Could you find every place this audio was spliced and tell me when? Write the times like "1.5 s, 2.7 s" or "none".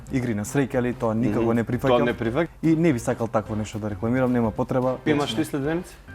2.5 s, 5.0 s